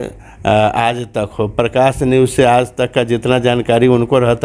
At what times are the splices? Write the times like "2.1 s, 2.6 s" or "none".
none